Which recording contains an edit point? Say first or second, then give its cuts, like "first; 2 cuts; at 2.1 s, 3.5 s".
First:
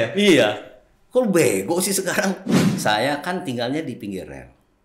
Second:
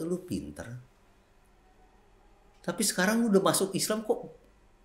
first; 1 cut; at 2.7 s